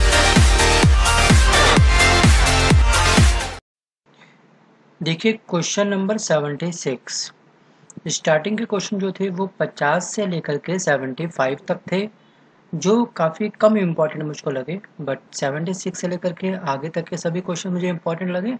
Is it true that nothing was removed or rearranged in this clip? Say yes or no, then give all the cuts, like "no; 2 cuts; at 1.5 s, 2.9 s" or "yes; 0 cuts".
yes; 0 cuts